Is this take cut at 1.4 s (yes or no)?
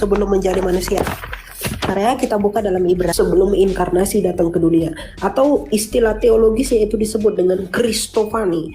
no